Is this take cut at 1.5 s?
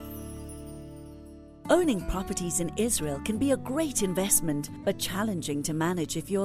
yes; 1 cut; at 1.5 s

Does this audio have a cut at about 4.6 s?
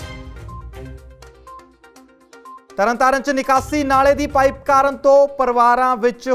no; 1 cut; at 1.8 s

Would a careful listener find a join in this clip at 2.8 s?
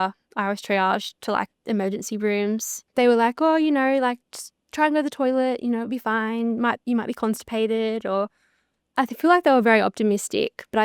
yes; 1 cut; at 2.8 s

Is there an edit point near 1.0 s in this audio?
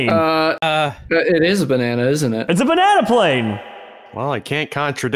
no; 0 cuts

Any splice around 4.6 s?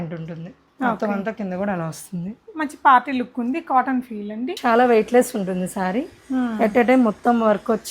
yes; 1 cut; at 4.6 s

